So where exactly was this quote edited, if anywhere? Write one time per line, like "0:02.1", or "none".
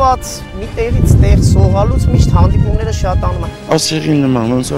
0:03.5